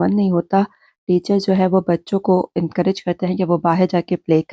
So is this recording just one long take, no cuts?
yes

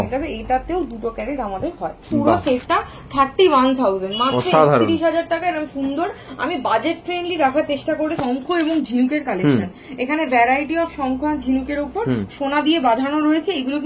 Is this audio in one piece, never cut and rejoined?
no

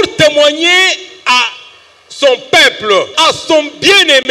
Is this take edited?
yes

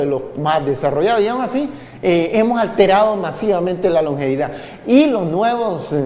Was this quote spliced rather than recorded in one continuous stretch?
yes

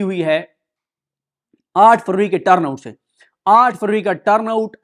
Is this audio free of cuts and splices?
yes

